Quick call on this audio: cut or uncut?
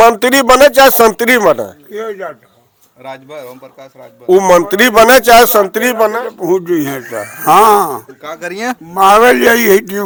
uncut